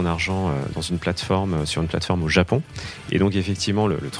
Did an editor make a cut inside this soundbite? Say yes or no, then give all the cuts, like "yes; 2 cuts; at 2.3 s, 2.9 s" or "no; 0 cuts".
no; 0 cuts